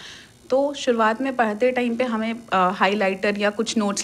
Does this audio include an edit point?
no; 0 cuts

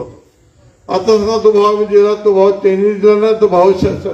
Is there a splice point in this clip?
no; 0 cuts

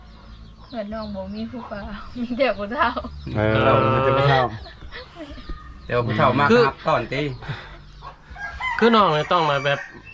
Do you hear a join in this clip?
no; 0 cuts

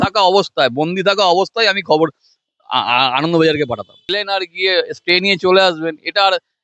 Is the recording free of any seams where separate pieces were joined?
no; 1 cut; at 4.1 s

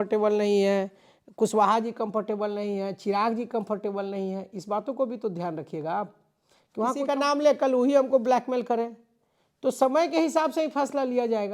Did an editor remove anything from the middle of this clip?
yes; 1 cut; at 7.0 s

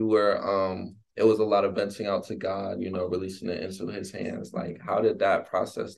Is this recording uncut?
yes; 0 cuts

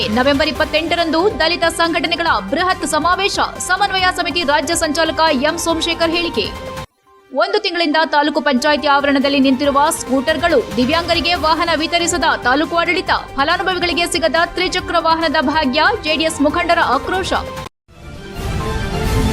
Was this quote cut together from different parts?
yes; 1 cut; at 17.7 s

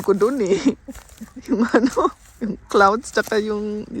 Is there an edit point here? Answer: no; 0 cuts

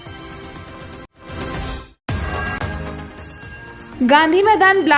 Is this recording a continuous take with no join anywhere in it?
yes; 0 cuts

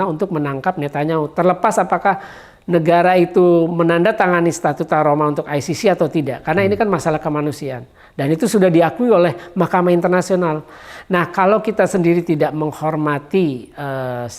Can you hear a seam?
no; 0 cuts

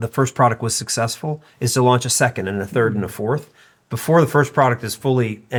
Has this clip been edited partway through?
no; 0 cuts

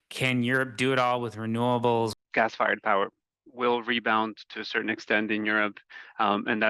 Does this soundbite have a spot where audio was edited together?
yes; 1 cut; at 2.1 s

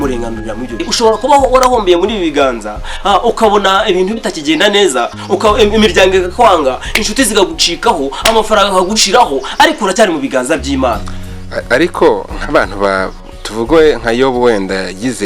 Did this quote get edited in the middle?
yes; 2 cuts; at 0.9 s, 11.1 s

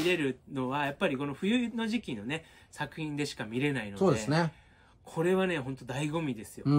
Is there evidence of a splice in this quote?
no; 0 cuts

